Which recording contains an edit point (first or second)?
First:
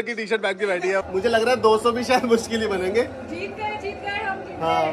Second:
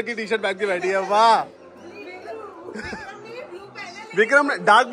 first